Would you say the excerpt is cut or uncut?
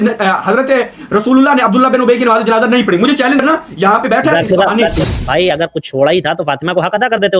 cut